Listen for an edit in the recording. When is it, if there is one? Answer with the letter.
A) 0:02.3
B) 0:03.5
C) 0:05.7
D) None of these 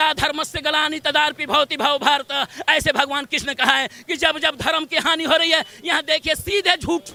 D